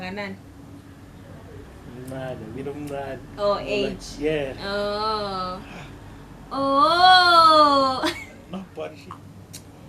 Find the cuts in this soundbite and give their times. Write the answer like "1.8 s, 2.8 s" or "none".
9.0 s